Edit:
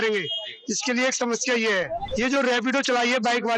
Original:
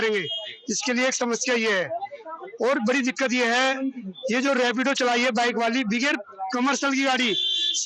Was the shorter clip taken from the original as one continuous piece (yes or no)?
no